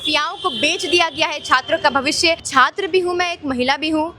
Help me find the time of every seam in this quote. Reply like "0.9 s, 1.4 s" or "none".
2.4 s